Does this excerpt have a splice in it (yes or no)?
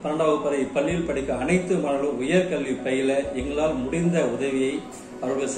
no